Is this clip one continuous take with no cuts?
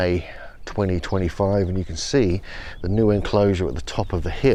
yes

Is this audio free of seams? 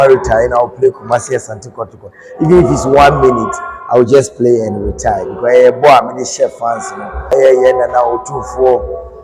no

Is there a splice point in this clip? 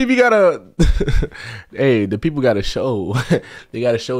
no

